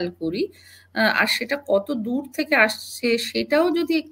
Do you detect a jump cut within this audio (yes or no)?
no